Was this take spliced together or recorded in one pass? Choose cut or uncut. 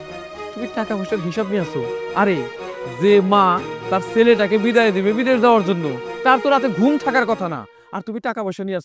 uncut